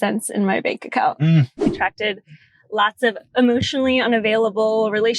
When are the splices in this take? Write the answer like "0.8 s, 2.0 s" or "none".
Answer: 1.7 s